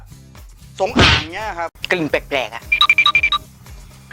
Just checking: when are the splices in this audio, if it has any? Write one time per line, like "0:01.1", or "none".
0:01.8